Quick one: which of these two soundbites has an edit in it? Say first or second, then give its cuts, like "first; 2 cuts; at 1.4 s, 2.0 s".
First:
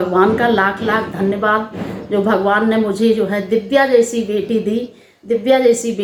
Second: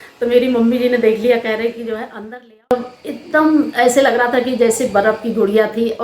second; 1 cut; at 2.7 s